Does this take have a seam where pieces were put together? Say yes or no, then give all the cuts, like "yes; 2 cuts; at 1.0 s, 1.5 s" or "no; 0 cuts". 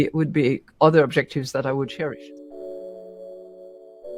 yes; 1 cut; at 2.2 s